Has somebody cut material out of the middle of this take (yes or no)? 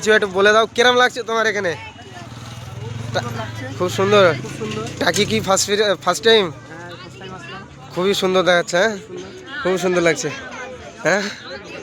no